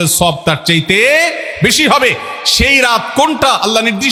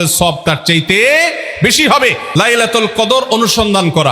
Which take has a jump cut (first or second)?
second